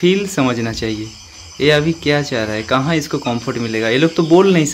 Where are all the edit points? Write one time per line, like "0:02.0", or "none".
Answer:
none